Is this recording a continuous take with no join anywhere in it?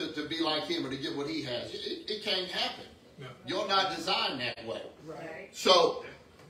no; 1 cut; at 4.6 s

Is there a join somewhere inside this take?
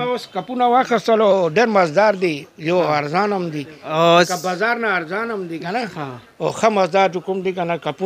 no; 0 cuts

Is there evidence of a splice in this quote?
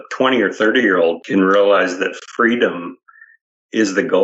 yes; 1 cut; at 1.2 s

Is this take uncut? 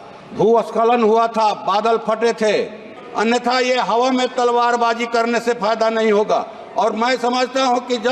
no; 1 cut; at 3.0 s

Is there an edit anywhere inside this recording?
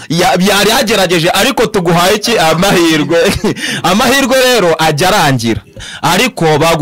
yes; 1 cut; at 5.9 s

